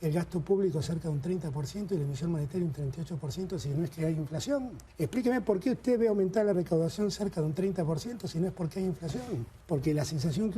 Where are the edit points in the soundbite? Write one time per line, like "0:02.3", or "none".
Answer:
0:04.8
0:09.5